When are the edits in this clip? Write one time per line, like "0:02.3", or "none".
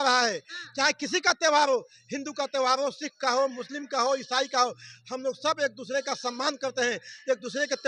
none